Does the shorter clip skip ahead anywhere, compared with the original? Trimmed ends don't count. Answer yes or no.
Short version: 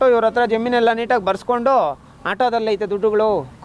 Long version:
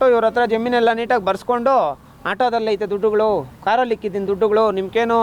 no